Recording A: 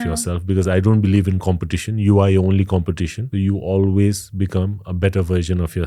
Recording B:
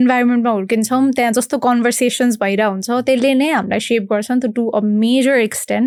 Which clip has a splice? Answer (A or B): A